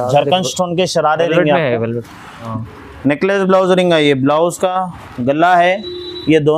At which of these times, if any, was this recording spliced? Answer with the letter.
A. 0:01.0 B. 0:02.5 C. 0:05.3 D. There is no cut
B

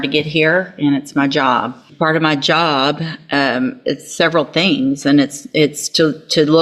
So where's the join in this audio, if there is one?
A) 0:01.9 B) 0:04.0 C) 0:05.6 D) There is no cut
A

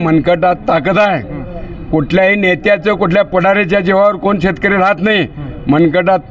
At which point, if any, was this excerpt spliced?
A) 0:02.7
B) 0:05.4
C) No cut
C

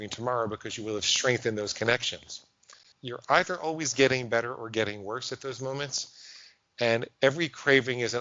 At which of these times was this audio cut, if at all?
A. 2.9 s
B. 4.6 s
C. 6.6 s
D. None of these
A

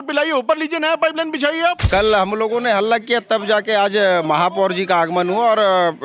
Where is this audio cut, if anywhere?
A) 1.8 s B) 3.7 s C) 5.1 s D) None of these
A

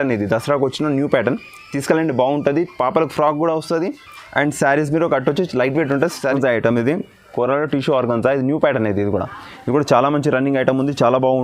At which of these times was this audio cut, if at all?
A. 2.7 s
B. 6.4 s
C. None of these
B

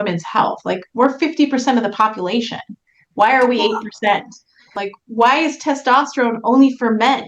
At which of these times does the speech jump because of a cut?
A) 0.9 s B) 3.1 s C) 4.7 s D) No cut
C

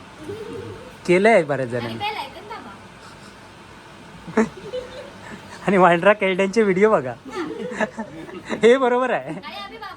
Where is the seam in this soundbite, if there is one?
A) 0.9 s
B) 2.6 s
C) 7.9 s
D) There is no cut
D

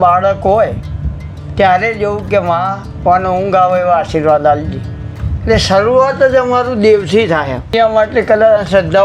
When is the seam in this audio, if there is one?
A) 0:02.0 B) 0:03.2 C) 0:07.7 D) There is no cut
C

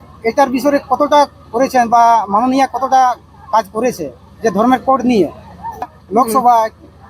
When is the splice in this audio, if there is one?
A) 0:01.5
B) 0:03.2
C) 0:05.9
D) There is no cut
C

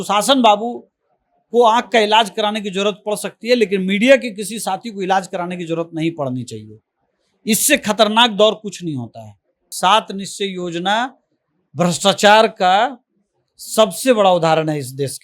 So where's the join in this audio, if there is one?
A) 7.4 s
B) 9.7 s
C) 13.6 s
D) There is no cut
B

